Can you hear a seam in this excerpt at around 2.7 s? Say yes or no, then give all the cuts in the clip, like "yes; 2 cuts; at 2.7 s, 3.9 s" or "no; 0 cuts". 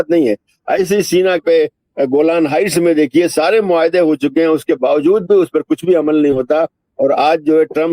no; 1 cut; at 1.4 s